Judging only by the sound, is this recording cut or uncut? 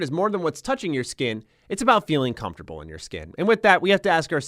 uncut